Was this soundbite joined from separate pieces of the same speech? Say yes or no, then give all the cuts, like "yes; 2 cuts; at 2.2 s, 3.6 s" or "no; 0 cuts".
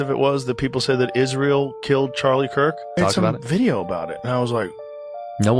no; 0 cuts